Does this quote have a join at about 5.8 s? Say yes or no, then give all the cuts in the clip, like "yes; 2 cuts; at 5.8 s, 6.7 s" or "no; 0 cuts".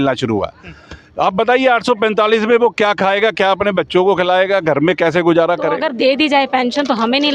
yes; 1 cut; at 5.8 s